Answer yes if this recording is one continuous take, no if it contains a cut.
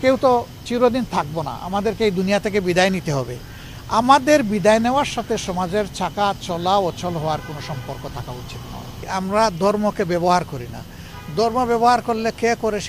no